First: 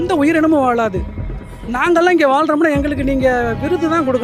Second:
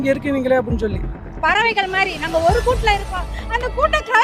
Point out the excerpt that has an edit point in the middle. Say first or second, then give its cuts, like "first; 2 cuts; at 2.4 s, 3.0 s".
second; 1 cut; at 1.2 s